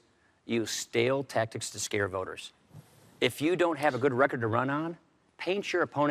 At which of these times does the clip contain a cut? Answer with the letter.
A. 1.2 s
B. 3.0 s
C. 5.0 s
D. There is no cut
B